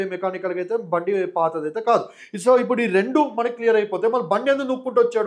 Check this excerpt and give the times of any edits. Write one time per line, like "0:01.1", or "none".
none